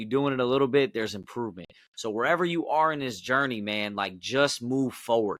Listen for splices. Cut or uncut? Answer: uncut